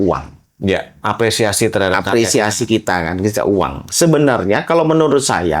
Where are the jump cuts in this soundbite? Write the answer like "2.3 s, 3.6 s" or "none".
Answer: 1.0 s